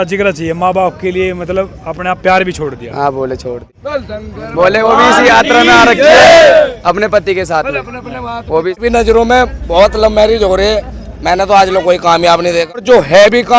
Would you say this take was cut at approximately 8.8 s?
yes; 3 cuts; at 3.7 s, 8.8 s, 12.8 s

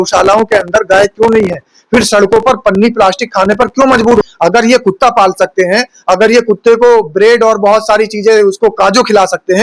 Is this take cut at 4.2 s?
yes; 1 cut; at 4.2 s

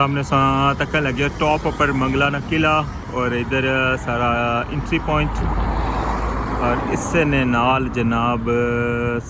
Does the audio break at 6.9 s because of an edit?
no; 0 cuts

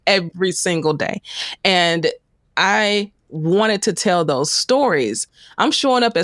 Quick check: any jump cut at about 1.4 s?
no; 1 cut; at 5.2 s

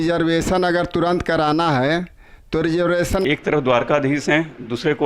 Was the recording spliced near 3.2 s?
yes; 1 cut; at 3.2 s

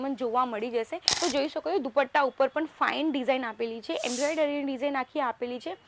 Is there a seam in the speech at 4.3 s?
no; 1 cut; at 1.0 s

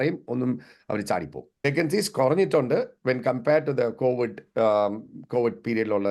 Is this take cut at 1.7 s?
yes; 1 cut; at 1.7 s

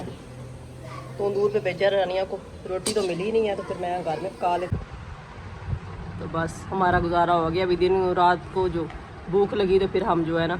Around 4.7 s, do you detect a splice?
yes; 1 cut; at 4.7 s

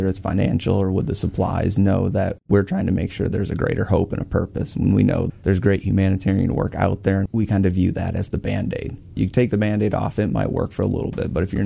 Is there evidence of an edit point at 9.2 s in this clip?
yes; 4 cuts; at 2.4 s, 5.3 s, 7.3 s, 9.2 s

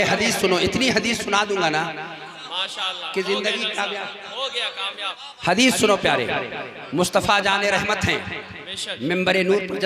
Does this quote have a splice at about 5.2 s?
yes; 1 cut; at 5.2 s

